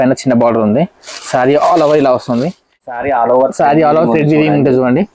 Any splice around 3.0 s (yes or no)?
yes